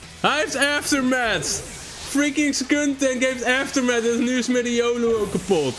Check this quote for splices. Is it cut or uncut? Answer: uncut